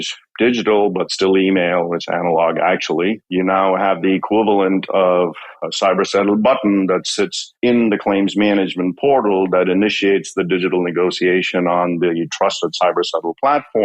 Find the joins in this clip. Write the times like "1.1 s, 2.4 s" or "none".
3.2 s